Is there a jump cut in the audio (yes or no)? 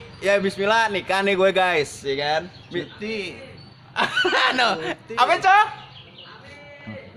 no